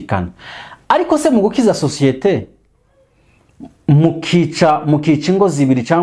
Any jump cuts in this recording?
no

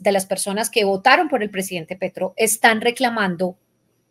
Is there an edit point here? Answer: no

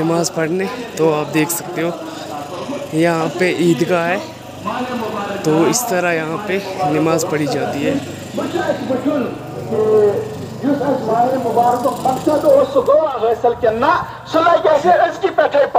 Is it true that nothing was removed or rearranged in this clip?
yes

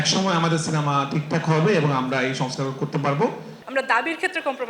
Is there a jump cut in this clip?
yes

